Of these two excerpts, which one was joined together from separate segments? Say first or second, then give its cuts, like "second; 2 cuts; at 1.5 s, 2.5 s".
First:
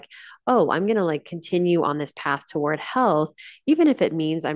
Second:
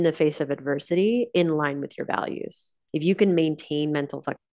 second; 1 cut; at 2.8 s